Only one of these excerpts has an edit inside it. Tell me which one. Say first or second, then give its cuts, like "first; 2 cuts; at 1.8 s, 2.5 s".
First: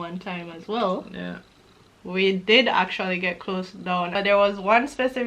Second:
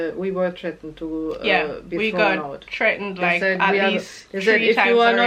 first; 1 cut; at 4.1 s